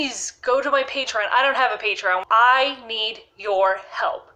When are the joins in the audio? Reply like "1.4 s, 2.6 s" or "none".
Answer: 2.2 s